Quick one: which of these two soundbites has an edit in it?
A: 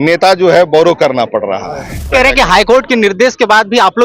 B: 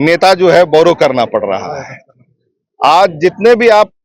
A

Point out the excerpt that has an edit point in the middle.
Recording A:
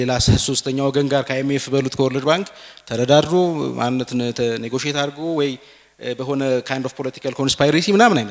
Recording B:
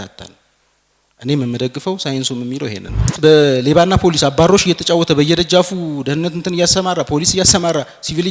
B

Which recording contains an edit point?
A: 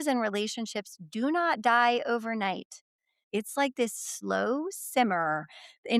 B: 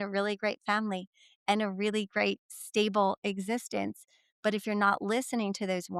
A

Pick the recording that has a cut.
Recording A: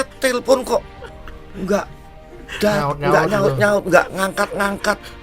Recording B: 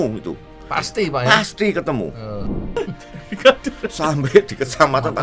B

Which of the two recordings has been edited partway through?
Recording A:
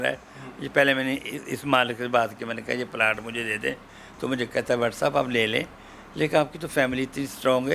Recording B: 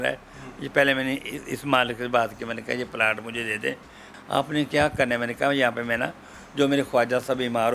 B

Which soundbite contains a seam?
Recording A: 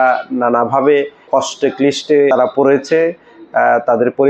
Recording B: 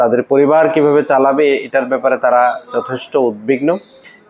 A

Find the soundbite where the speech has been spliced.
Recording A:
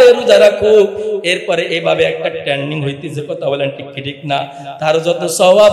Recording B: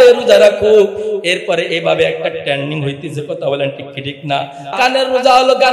B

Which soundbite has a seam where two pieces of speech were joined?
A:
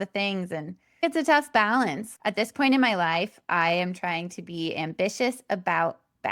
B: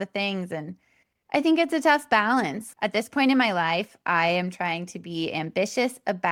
A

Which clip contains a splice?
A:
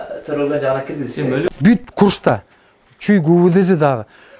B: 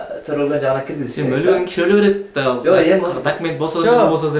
A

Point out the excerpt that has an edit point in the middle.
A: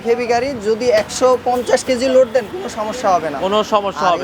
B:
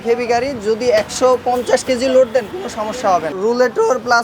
B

